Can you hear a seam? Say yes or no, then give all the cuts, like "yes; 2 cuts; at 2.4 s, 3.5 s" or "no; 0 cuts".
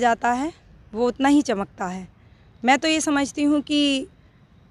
no; 0 cuts